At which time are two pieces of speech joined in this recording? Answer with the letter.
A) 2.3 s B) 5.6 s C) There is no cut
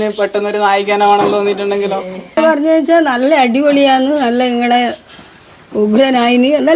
A